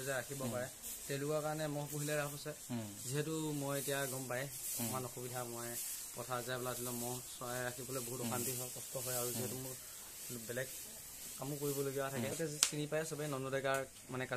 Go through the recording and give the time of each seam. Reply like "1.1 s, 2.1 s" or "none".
12.4 s